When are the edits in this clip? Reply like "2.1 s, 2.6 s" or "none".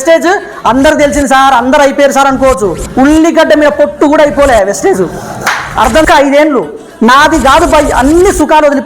5.9 s